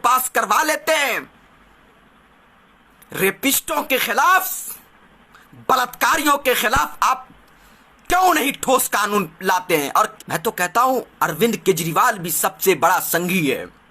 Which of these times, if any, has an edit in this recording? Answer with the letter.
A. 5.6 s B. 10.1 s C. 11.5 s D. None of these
B